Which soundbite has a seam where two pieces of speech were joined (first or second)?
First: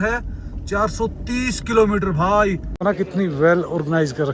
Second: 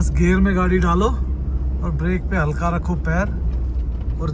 first